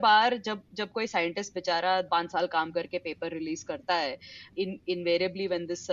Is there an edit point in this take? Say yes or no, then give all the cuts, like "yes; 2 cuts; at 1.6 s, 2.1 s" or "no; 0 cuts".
yes; 2 cuts; at 2.1 s, 4.5 s